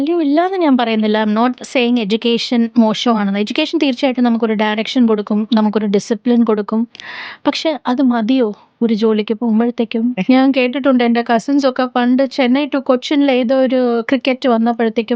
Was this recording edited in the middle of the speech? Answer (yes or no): yes